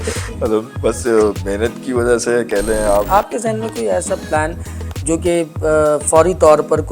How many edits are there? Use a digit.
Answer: 1